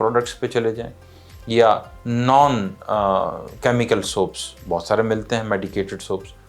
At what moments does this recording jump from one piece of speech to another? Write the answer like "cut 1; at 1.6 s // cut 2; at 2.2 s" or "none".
none